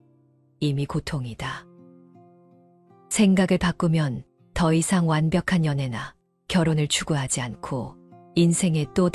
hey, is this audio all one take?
yes; 0 cuts

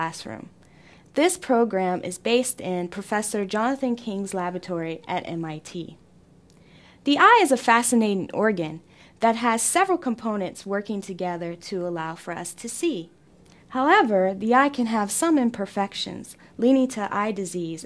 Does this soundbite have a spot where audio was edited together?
no; 0 cuts

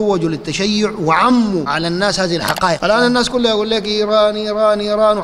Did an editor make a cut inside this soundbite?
yes; 2 cuts; at 1.7 s, 2.8 s

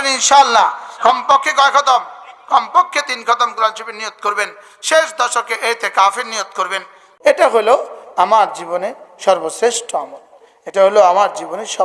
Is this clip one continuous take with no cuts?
no; 1 cut; at 7.0 s

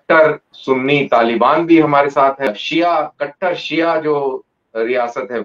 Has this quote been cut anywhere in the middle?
yes; 1 cut; at 2.5 s

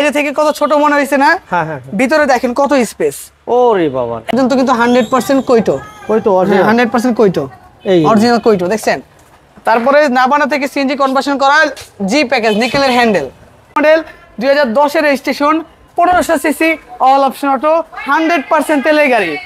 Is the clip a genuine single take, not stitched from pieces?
no; 2 cuts; at 4.3 s, 13.8 s

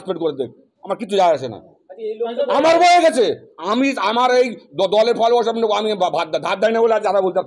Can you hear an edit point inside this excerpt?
no; 0 cuts

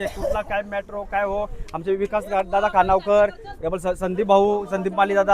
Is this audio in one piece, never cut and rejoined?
yes; 0 cuts

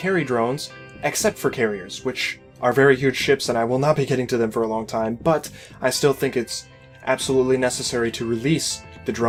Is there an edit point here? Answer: no; 0 cuts

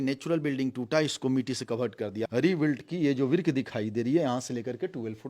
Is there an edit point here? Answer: yes; 1 cut; at 2.3 s

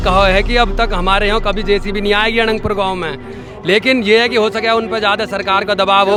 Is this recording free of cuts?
yes; 0 cuts

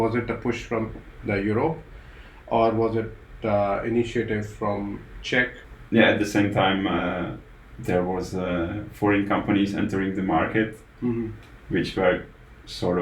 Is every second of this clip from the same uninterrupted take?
no; 1 cut; at 5.7 s

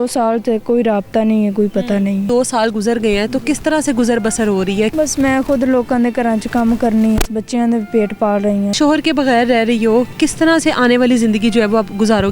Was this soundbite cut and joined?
yes; 4 cuts; at 2.3 s, 4.9 s, 7.3 s, 8.7 s

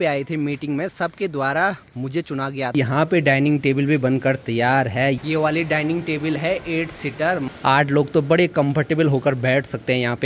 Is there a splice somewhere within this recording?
yes; 3 cuts; at 2.7 s, 5.2 s, 7.5 s

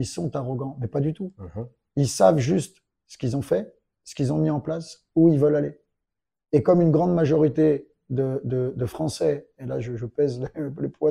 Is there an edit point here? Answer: no; 0 cuts

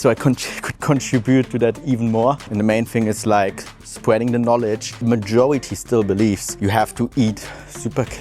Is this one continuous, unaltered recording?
no; 3 cuts; at 2.5 s, 5.0 s, 6.5 s

